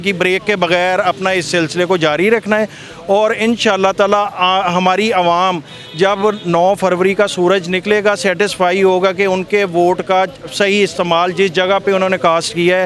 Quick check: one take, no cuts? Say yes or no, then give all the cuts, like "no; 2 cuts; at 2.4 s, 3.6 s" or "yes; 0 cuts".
yes; 0 cuts